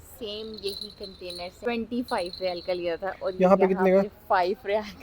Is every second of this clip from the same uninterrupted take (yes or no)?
no